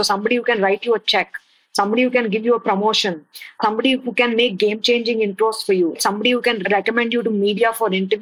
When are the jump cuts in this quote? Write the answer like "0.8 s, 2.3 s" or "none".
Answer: 5.9 s